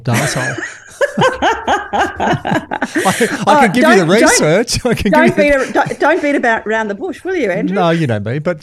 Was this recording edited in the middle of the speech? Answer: no; 0 cuts

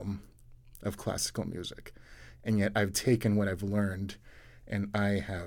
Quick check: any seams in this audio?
no; 0 cuts

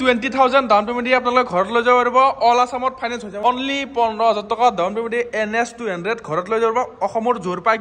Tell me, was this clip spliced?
yes; 1 cut; at 3.4 s

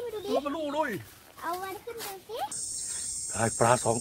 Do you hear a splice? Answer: yes; 1 cut; at 2.6 s

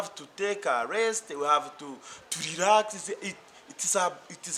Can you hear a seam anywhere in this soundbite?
no; 0 cuts

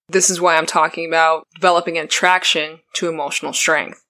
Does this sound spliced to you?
yes; 1 cut; at 1.5 s

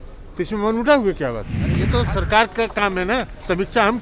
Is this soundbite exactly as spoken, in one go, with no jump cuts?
no; 1 cut; at 1.7 s

